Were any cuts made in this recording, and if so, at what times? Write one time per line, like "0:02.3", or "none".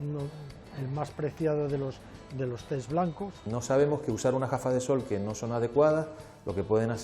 0:03.4